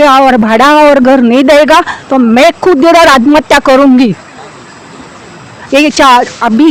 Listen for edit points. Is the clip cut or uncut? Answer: uncut